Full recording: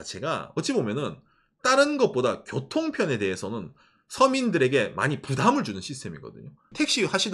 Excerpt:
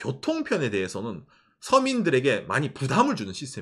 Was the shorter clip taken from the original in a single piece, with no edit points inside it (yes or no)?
yes